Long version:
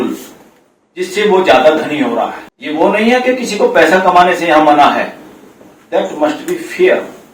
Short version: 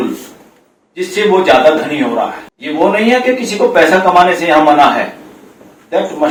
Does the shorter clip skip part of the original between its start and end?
no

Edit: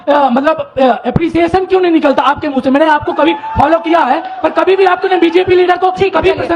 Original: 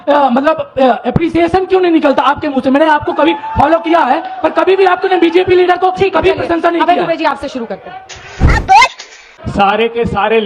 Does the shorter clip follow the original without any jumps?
yes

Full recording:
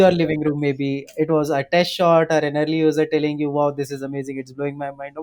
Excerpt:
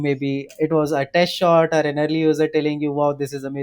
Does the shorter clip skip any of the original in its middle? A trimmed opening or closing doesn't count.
no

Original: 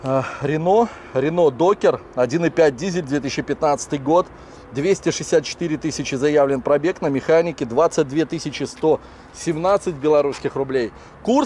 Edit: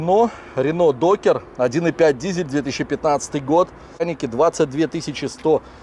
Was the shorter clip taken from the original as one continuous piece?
no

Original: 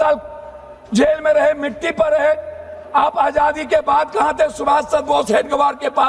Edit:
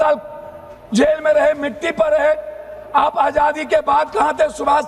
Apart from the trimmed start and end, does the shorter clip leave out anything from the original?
no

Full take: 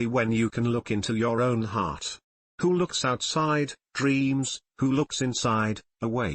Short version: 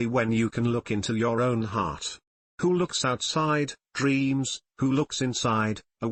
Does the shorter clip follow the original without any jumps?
yes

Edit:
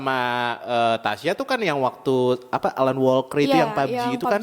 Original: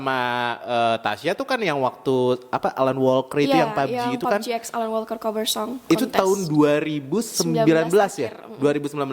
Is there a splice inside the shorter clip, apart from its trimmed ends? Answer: no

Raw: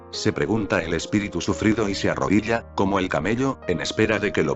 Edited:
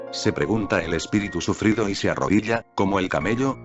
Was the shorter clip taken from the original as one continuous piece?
yes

